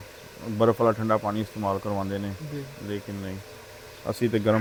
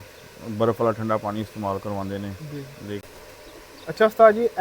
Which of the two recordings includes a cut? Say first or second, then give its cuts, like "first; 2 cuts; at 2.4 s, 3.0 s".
second; 1 cut; at 3.0 s